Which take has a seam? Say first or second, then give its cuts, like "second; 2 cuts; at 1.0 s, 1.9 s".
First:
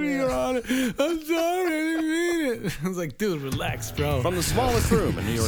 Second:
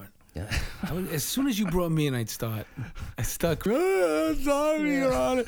second; 1 cut; at 3.6 s